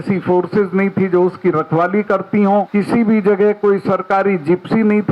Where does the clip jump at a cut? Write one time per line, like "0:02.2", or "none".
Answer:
0:02.7